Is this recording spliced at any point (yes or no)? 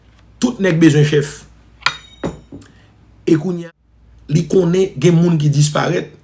yes